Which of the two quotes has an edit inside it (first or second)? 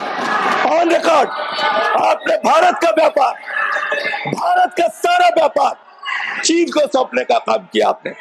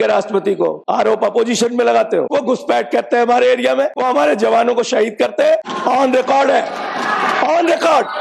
second